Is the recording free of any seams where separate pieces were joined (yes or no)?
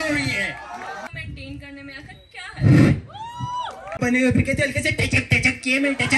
no